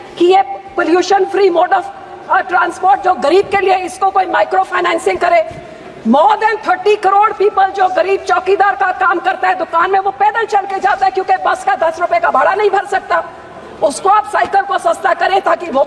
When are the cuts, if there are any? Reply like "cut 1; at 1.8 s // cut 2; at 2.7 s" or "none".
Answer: none